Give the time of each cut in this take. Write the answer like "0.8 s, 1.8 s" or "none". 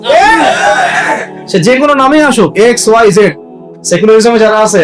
3.7 s